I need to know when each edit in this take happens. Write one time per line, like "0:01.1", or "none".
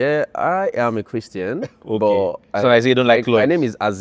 none